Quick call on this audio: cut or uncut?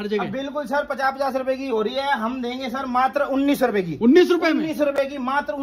uncut